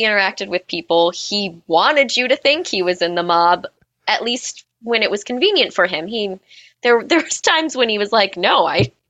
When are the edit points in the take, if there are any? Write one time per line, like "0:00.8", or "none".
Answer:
none